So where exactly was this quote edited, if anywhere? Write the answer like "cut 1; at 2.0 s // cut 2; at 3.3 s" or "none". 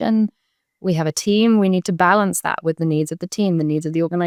none